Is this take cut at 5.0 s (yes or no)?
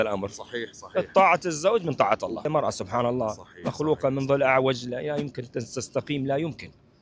no